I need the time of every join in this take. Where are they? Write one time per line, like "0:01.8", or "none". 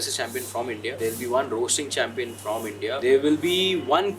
0:01.0
0:03.0

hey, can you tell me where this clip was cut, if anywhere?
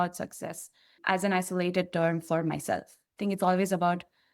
0:01.0

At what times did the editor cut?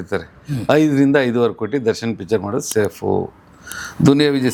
none

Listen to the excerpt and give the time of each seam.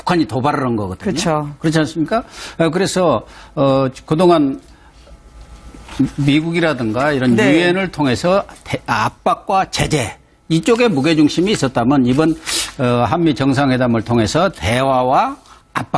0:11.7

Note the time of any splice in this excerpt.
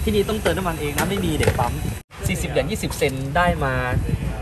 0:01.9

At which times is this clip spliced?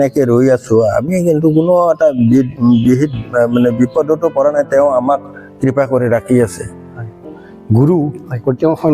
0:07.2

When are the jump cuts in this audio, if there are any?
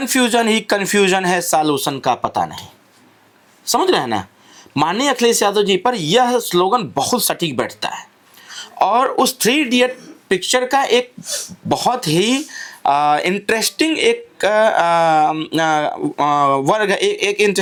none

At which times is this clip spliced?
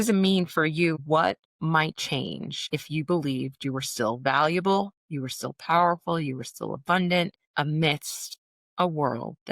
0:00.9

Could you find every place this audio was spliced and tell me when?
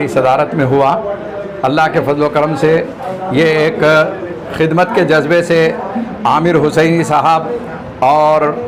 none

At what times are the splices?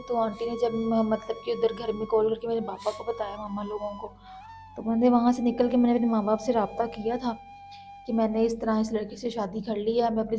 none

